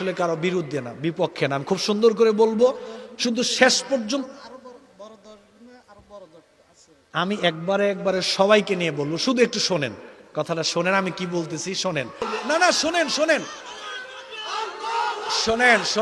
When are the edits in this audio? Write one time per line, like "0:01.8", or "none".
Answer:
0:12.3